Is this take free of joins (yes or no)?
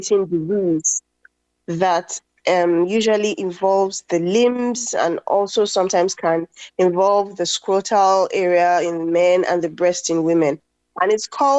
yes